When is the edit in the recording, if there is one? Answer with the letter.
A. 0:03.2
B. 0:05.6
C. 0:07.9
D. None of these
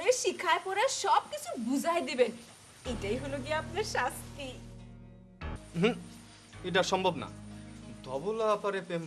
B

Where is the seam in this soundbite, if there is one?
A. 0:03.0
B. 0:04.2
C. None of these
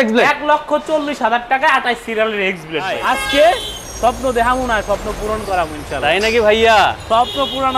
A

